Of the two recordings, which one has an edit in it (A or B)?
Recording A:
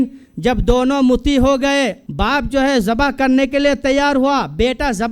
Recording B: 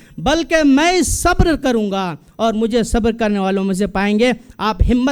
A